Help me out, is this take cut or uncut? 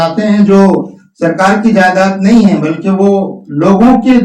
uncut